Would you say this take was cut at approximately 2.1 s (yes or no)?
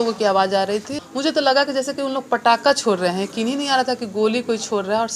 no